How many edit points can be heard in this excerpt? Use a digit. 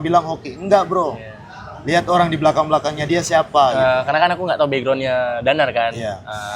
1